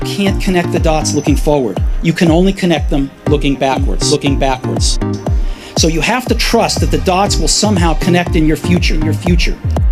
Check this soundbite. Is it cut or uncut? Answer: uncut